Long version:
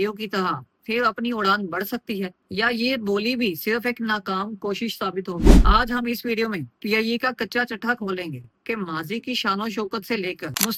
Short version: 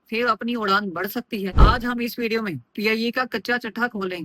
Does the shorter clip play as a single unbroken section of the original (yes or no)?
no